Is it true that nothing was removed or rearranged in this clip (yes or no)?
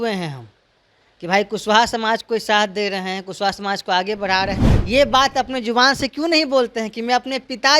no